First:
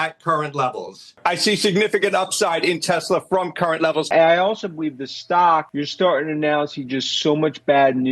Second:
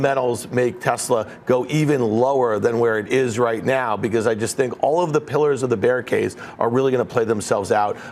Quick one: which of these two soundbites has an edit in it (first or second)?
first